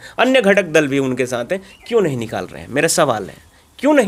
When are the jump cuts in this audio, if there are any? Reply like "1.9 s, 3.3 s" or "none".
none

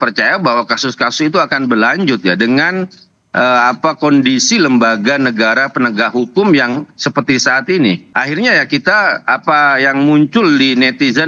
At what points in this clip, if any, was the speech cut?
8.1 s

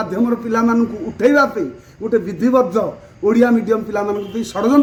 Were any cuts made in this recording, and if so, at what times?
none

